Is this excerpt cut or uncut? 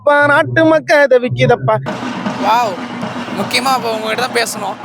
cut